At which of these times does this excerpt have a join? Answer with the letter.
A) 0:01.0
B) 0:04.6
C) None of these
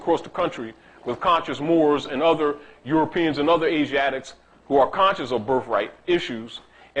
C